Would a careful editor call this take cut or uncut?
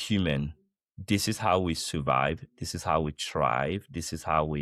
uncut